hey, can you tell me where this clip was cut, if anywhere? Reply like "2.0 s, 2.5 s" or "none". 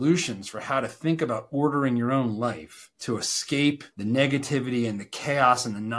none